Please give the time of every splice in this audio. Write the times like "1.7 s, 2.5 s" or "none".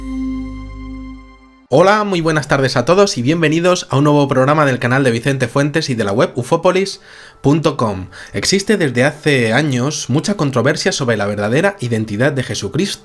none